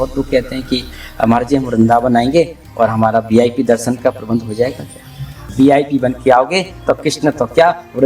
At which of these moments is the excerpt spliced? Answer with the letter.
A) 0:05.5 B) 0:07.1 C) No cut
A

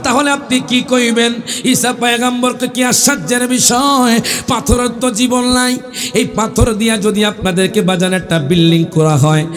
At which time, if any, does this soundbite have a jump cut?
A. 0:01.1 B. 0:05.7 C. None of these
C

